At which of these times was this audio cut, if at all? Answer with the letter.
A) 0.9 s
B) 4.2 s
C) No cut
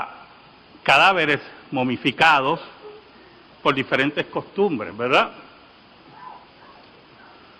B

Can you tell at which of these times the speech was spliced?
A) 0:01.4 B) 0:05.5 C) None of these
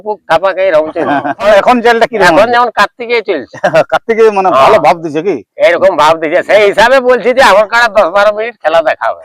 A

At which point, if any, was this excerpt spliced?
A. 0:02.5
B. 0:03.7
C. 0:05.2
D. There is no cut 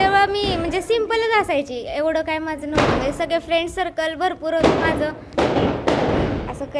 C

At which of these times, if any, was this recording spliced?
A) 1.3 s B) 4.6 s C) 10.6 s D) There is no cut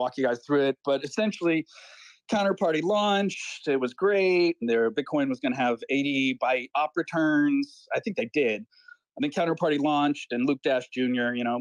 B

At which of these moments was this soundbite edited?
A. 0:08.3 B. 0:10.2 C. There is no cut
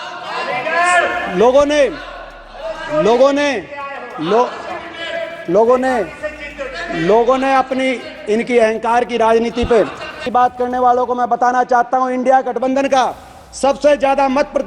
B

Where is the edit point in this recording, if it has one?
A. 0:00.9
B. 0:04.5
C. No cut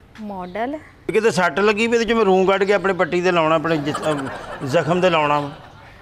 A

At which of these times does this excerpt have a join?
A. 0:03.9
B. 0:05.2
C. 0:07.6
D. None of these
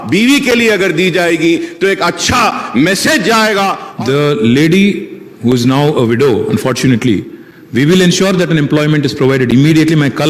A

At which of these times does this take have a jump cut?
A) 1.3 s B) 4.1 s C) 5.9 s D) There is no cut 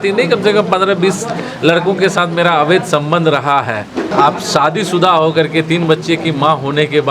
B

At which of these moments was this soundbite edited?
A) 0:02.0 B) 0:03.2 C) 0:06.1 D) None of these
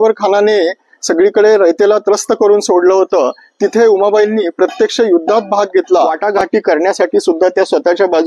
C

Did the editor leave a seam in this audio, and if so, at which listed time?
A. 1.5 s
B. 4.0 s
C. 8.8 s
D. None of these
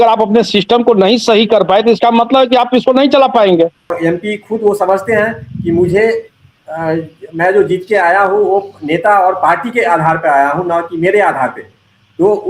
B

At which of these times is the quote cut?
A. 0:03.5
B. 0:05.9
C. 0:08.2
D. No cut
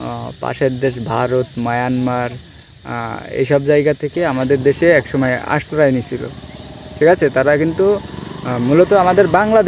D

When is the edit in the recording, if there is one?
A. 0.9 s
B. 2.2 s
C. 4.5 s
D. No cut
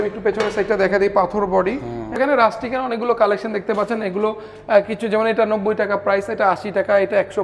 B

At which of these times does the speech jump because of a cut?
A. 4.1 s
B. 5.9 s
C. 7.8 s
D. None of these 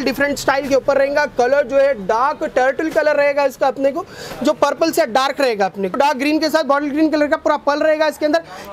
B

